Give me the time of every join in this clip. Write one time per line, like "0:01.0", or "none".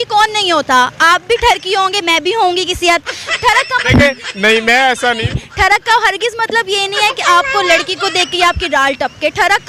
none